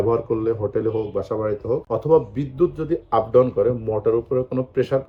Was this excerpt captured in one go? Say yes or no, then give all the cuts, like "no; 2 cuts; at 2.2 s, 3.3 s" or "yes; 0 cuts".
yes; 0 cuts